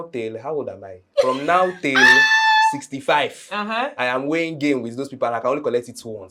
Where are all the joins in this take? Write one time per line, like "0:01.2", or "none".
none